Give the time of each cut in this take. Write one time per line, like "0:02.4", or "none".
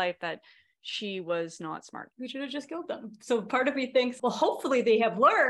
0:02.0
0:04.1